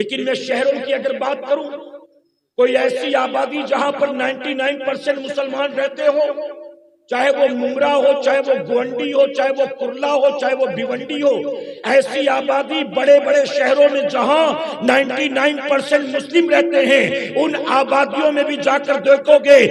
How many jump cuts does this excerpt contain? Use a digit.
0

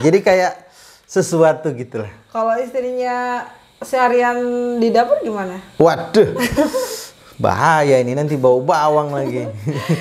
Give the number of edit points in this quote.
0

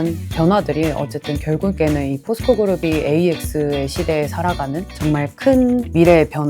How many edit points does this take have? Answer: 1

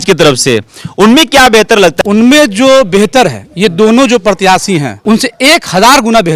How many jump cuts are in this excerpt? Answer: 2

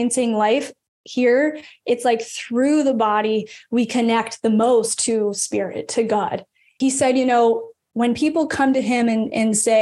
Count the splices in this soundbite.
1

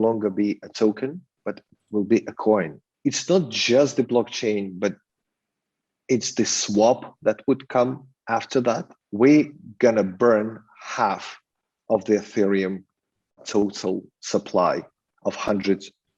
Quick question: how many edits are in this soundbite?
3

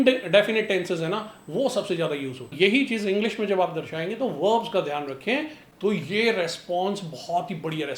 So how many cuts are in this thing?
2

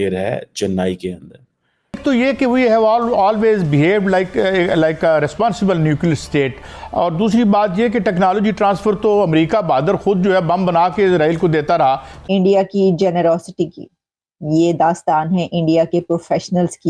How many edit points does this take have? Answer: 2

